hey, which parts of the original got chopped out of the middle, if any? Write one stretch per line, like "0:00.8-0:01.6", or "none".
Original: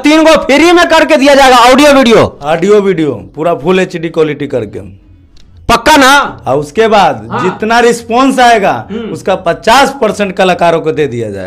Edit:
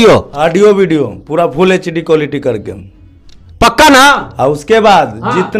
none